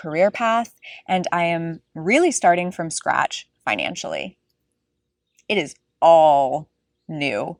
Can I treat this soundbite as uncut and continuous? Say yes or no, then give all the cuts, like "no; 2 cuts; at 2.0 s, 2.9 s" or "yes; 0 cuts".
yes; 0 cuts